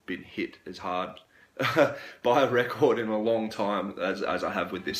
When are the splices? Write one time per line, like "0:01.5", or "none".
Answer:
none